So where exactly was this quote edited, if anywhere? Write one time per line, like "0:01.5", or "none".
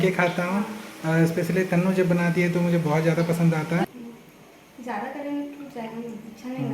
0:03.9

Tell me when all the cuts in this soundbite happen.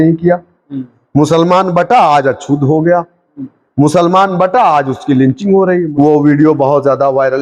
0:05.8

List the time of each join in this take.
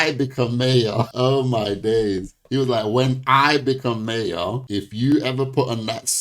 0:01.1

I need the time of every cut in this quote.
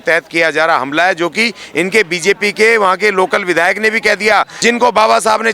0:04.5

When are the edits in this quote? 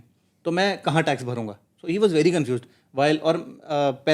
none

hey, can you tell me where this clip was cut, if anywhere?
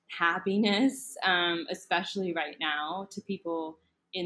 none

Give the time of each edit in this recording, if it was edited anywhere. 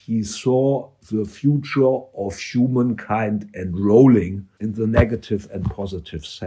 0:00.9
0:04.4

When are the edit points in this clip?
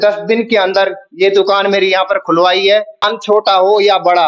0:03.1

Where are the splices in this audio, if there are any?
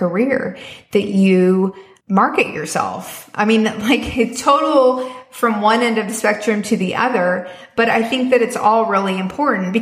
0:01.9

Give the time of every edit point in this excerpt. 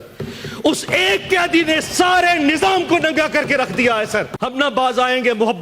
0:04.4

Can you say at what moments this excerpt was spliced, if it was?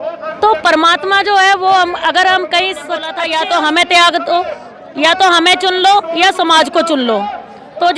0:03.2

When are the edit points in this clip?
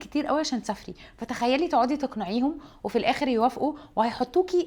none

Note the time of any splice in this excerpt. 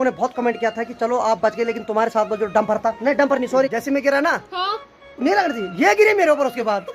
0:03.7

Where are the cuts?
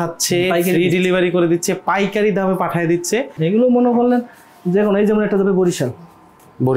0:03.3

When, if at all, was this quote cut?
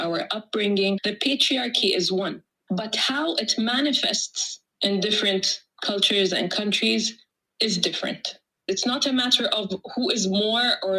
0:08.6

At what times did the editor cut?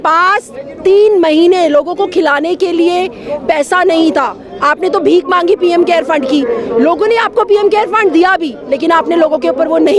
none

